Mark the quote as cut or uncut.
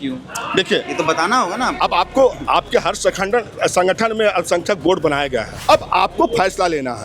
cut